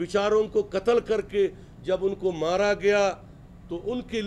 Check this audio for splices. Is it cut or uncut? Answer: uncut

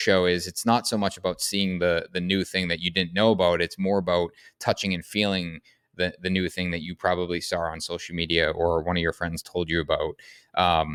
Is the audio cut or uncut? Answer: uncut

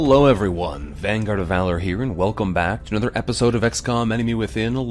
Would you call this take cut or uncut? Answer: uncut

